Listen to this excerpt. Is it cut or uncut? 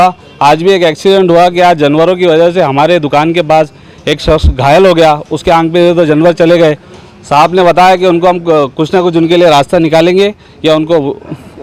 uncut